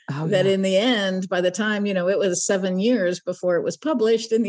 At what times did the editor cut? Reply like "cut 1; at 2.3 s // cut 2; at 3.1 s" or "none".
none